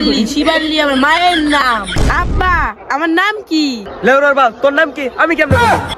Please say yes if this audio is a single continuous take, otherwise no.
no